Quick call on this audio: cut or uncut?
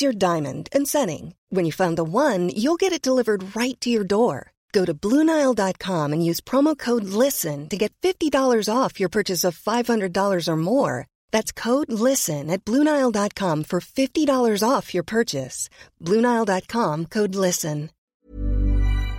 cut